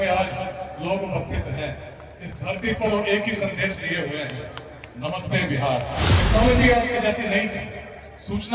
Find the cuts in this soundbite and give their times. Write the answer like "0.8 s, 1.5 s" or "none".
6.1 s